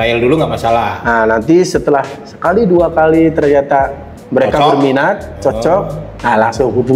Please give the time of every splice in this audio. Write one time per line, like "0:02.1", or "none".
none